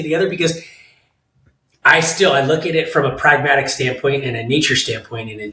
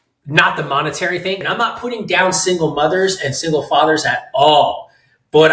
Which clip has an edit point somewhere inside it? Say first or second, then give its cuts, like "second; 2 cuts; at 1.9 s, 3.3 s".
second; 1 cut; at 1.4 s